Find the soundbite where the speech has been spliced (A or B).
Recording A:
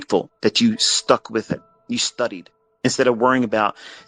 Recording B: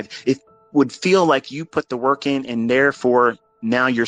A